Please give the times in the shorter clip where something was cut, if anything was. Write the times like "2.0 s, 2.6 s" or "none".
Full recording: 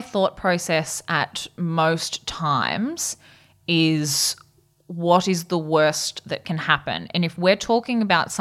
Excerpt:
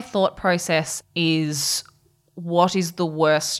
1.0 s